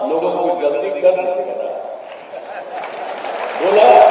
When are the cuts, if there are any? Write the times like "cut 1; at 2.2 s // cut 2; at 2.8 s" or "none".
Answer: none